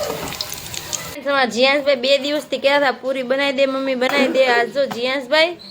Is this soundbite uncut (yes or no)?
no